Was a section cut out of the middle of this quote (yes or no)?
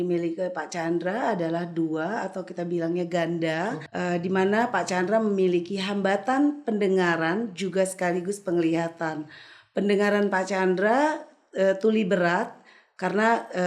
yes